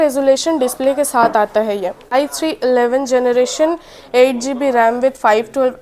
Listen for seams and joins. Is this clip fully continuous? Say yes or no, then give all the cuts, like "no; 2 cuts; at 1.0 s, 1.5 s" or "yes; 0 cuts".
no; 1 cut; at 2.1 s